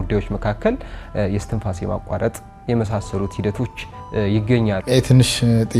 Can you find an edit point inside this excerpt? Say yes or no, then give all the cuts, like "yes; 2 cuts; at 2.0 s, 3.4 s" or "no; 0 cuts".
yes; 1 cut; at 4.8 s